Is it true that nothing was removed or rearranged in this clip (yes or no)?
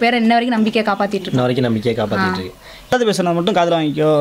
no